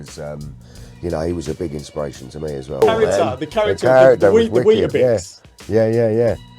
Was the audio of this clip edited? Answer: yes; 1 cut; at 2.8 s

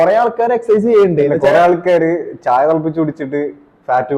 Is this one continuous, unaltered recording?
yes; 0 cuts

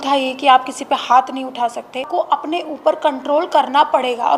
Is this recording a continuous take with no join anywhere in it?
no; 1 cut; at 2.1 s

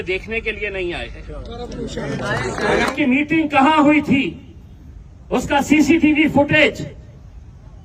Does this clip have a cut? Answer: yes; 1 cut; at 2.9 s

